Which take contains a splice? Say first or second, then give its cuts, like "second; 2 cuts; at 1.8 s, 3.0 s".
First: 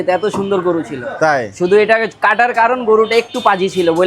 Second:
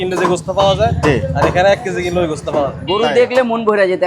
second; 1 cut; at 2.8 s